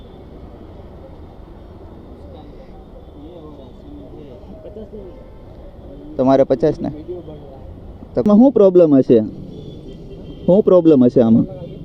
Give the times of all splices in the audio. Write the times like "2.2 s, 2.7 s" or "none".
8.3 s